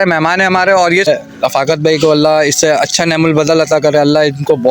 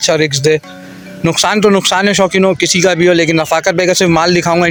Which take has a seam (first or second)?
first